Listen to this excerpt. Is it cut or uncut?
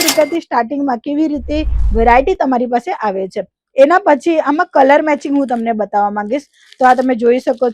uncut